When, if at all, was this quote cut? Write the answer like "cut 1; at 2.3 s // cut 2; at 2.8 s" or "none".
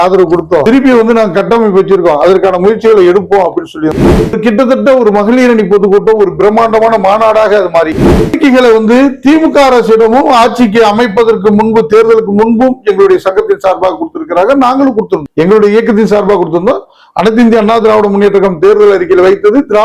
cut 1; at 4.0 s // cut 2; at 8.3 s